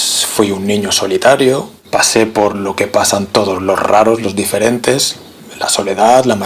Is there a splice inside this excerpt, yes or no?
yes